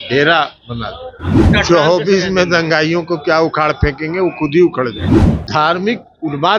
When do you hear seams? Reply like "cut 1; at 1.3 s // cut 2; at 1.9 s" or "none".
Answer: cut 1; at 1.5 s // cut 2; at 5.0 s